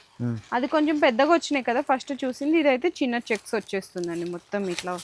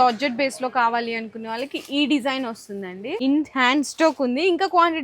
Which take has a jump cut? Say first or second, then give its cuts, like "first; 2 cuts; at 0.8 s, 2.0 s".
second; 1 cut; at 3.0 s